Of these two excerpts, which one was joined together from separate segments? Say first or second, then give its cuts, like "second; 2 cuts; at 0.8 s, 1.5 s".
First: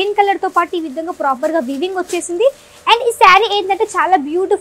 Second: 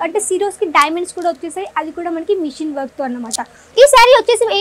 second; 1 cut; at 3.6 s